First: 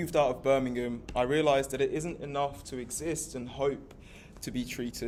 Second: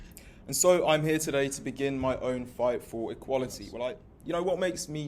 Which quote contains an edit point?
second; 1 cut; at 4.1 s

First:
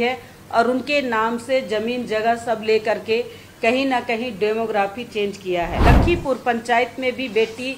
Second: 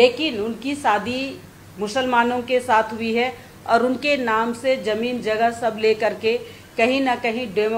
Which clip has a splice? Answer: first; 1 cut; at 5.7 s

